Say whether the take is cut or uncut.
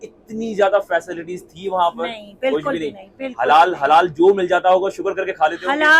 uncut